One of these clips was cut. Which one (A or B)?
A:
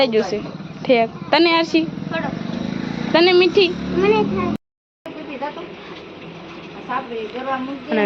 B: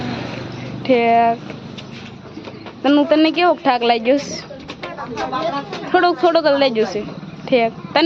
A